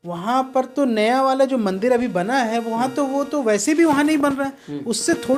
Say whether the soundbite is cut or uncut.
uncut